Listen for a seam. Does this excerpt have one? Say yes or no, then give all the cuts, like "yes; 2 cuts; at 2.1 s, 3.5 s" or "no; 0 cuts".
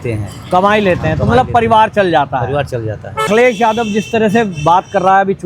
yes; 1 cut; at 3.3 s